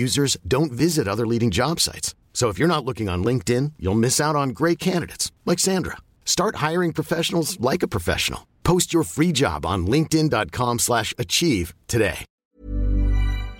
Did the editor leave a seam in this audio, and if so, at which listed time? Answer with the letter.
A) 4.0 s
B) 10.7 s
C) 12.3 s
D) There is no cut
C